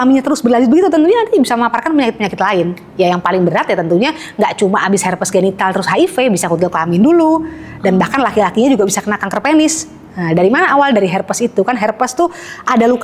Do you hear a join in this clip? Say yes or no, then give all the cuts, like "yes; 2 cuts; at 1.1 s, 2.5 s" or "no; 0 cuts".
no; 0 cuts